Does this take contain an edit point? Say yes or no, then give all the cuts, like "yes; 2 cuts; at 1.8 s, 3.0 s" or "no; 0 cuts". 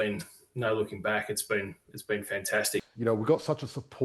yes; 1 cut; at 2.9 s